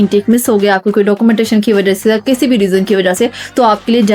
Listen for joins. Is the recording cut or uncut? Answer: uncut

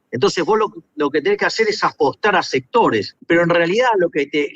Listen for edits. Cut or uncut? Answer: cut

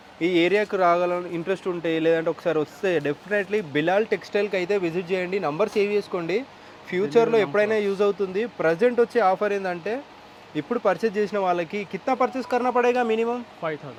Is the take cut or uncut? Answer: uncut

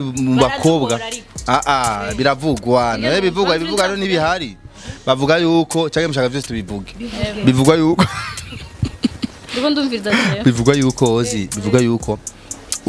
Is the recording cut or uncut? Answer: uncut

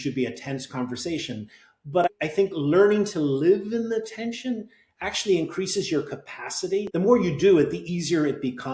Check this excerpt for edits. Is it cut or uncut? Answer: cut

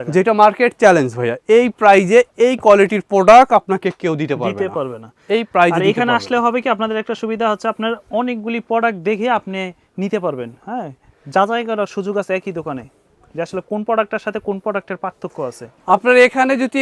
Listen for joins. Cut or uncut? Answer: uncut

